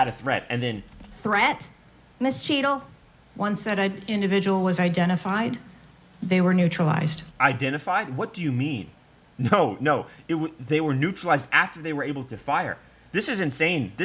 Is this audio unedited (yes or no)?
yes